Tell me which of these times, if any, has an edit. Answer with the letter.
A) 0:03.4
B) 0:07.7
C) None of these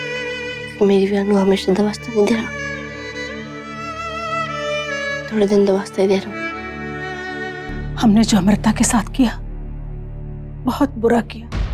B